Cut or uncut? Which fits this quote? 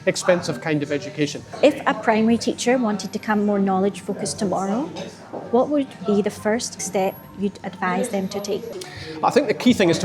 cut